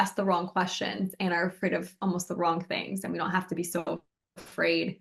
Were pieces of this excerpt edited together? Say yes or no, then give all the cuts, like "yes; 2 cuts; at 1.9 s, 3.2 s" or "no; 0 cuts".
no; 0 cuts